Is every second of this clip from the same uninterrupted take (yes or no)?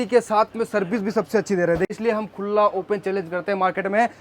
no